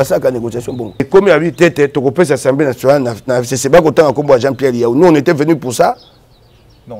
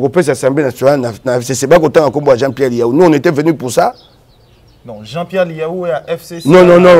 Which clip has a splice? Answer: first; 1 cut; at 1.1 s

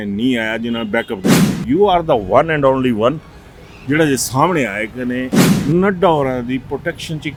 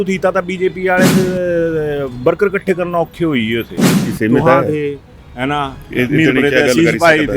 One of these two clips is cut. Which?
second; 1 cut; at 4.1 s

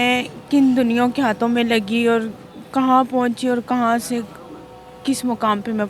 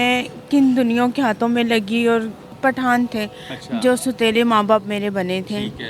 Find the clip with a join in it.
second; 1 cut; at 2.5 s

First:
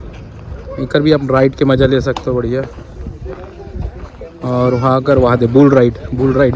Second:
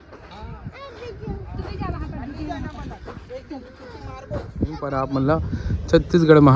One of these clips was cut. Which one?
second; 1 cut; at 4.7 s

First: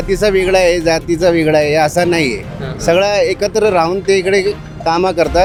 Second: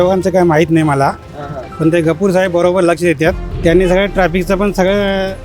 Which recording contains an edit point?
second; 1 cut; at 3.5 s

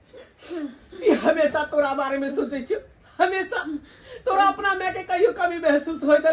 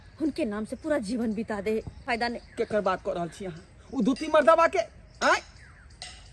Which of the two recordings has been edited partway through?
second; 1 cut; at 2.0 s

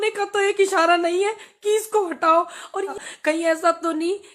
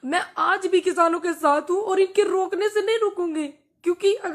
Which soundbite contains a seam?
first; 1 cut; at 2.9 s

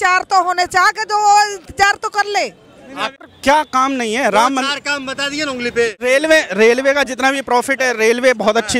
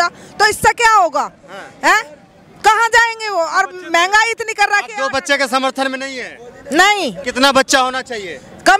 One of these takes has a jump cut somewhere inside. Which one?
first; 2 cuts; at 3.2 s, 6.1 s

